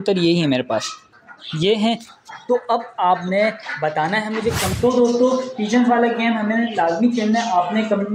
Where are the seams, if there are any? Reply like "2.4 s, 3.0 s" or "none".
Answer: 4.7 s